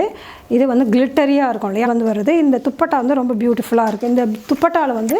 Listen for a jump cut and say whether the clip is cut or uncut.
cut